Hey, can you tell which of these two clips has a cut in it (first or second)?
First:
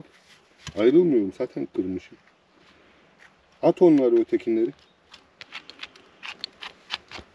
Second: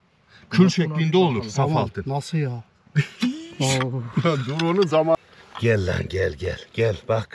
second